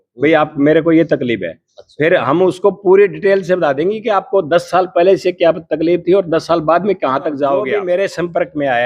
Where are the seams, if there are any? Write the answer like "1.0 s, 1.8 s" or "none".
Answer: 7.6 s